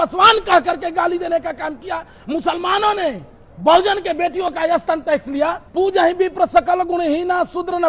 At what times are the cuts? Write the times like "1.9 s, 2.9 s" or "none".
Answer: 5.6 s